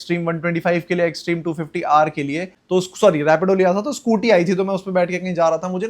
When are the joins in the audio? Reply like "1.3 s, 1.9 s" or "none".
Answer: 2.5 s

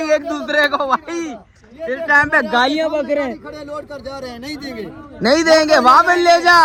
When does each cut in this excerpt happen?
none

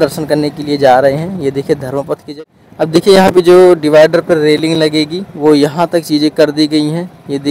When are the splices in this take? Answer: 2.3 s

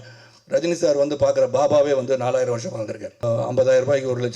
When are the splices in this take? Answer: 3.2 s

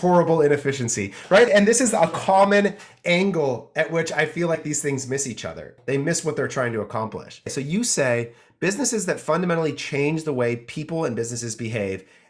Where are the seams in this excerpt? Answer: 1.5 s, 5.7 s, 7.5 s

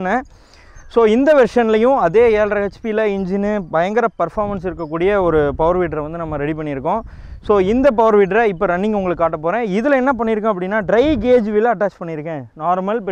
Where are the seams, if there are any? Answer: none

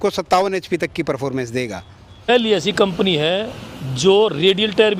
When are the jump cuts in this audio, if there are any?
2.3 s

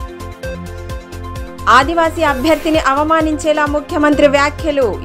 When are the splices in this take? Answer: none

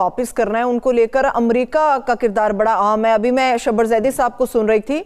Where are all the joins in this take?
none

